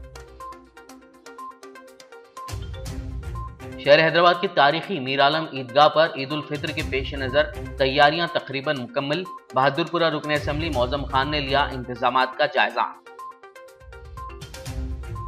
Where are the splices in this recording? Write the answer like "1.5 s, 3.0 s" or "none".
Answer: 1.2 s, 1.8 s, 3.5 s

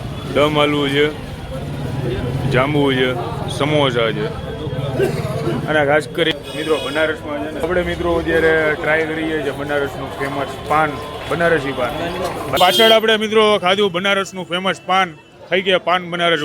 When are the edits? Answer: 7.6 s, 12.6 s

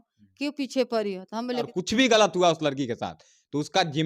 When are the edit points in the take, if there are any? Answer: 1.7 s

